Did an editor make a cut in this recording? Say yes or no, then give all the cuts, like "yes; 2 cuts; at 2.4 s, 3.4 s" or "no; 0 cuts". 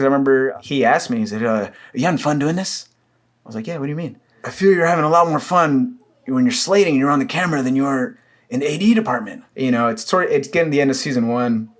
yes; 2 cuts; at 4.4 s, 9.4 s